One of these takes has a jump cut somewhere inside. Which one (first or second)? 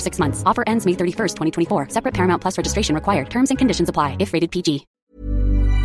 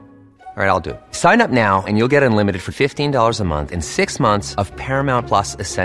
first